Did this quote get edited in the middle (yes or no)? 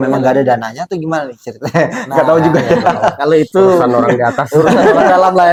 no